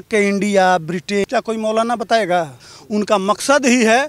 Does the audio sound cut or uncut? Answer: cut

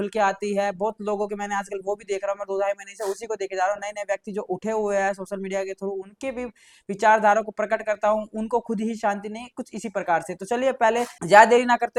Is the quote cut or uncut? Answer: uncut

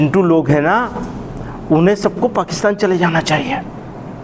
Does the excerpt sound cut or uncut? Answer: uncut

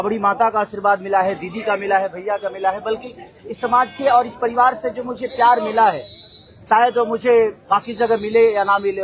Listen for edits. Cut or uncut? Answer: uncut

